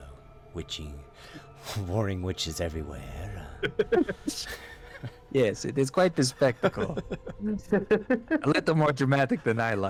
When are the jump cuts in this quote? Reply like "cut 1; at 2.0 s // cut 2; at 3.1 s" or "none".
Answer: none